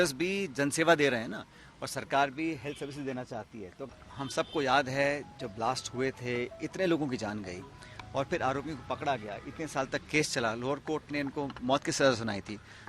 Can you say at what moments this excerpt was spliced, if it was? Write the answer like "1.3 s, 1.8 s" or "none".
3.9 s